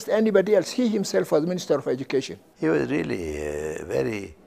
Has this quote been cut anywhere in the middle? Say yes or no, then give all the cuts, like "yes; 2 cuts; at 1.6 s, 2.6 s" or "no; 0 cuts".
yes; 1 cut; at 2.4 s